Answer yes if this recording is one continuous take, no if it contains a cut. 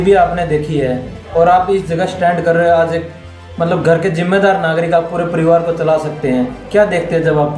yes